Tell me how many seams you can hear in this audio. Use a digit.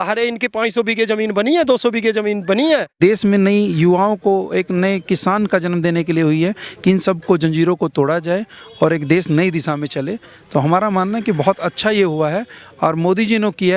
1